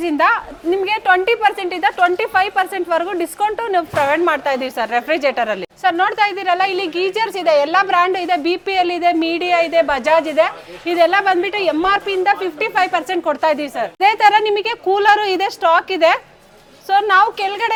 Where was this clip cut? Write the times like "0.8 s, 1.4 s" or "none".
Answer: none